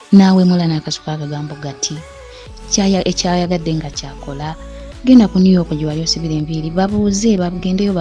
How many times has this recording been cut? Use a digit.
1